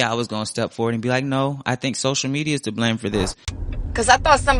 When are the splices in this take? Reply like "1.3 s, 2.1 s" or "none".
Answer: 3.4 s